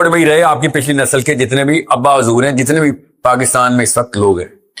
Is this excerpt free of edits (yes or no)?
yes